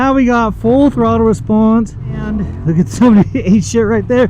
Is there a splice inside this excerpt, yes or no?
yes